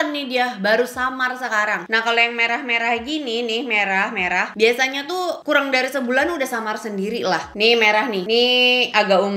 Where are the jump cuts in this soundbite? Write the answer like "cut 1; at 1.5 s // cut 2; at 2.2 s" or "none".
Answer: none